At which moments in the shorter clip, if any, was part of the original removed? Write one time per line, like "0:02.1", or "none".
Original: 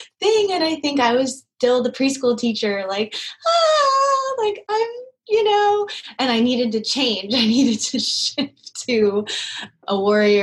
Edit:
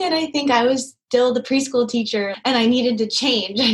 0:02.3